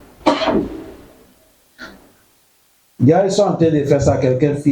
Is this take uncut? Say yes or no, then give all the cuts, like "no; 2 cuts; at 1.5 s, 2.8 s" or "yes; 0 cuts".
no; 1 cut; at 2.0 s